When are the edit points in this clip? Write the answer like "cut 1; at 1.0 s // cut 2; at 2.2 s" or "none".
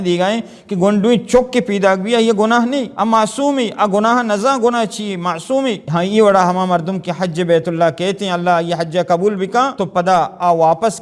cut 1; at 2.9 s // cut 2; at 5.8 s // cut 3; at 9.8 s